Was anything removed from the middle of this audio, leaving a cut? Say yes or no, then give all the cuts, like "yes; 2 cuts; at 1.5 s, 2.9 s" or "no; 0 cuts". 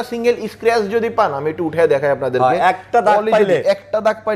no; 0 cuts